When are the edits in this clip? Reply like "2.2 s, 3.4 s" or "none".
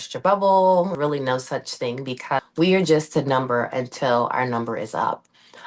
0.9 s, 2.4 s